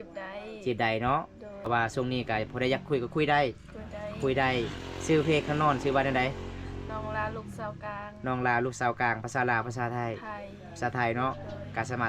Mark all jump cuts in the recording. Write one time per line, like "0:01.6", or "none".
0:01.5